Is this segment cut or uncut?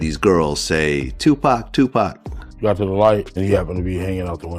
cut